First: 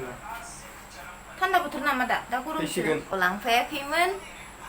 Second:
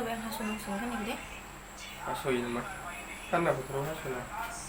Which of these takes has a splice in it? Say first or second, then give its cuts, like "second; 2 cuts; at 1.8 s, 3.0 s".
first; 1 cut; at 3.1 s